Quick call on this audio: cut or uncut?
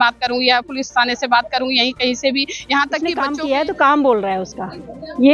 cut